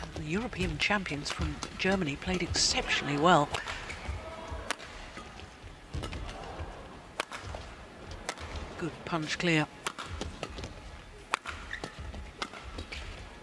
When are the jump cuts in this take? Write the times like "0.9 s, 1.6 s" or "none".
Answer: none